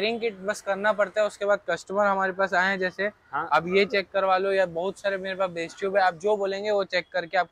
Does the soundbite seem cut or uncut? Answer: uncut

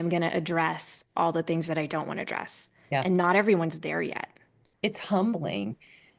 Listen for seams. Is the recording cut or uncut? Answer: uncut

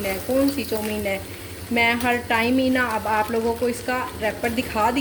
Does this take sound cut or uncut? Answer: uncut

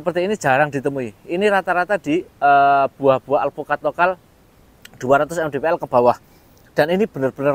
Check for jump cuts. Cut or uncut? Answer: uncut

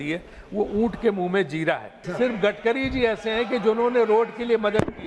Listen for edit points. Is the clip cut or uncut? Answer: cut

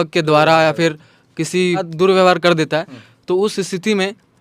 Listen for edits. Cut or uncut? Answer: cut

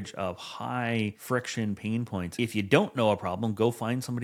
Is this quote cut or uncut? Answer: cut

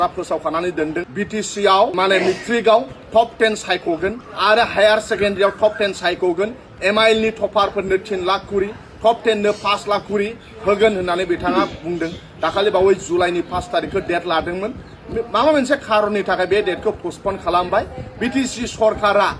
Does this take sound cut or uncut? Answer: cut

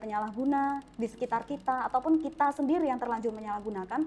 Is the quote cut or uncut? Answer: uncut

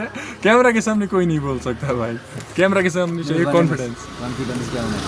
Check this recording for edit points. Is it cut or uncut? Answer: uncut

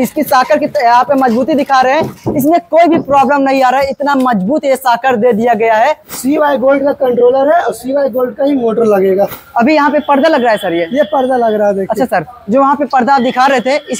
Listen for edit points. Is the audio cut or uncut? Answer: cut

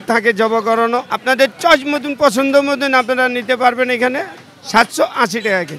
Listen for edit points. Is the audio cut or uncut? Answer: cut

